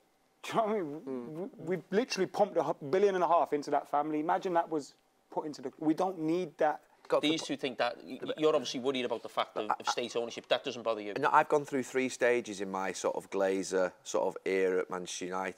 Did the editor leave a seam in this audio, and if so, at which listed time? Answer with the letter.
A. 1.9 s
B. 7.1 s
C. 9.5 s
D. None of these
B